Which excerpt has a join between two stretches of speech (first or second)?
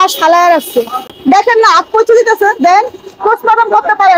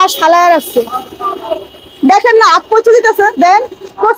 first